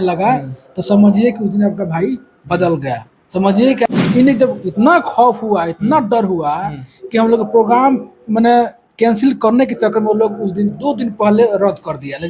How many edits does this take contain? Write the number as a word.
one